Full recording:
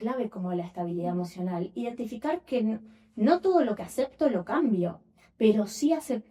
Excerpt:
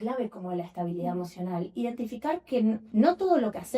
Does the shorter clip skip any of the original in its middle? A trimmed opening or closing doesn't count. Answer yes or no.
yes